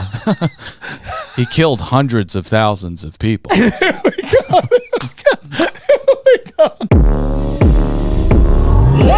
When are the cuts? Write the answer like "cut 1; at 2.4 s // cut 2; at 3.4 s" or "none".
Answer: cut 1; at 6.8 s